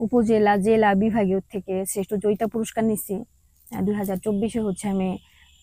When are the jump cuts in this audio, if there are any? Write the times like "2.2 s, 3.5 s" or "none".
none

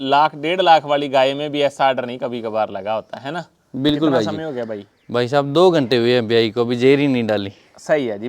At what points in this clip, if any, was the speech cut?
4.4 s

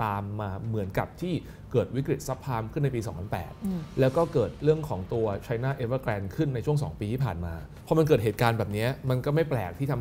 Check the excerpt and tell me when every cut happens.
7.7 s

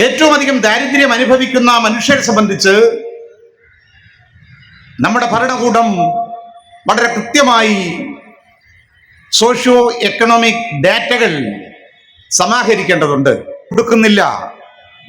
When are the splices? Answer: 13.7 s

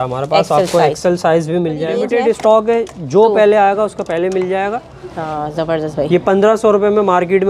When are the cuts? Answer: 2.0 s

